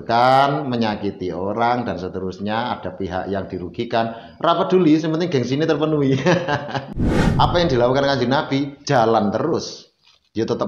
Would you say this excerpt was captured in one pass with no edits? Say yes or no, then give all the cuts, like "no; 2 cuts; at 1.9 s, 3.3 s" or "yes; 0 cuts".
no; 1 cut; at 6.9 s